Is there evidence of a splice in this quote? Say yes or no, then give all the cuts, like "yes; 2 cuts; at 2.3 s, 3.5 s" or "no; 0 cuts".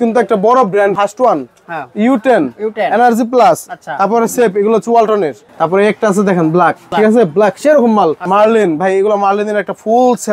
yes; 4 cuts; at 0.9 s, 5.4 s, 6.8 s, 8.2 s